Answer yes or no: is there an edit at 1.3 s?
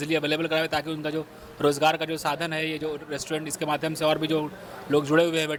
no